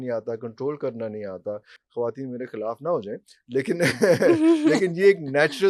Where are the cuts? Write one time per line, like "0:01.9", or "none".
none